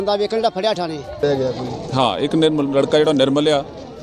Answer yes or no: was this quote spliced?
yes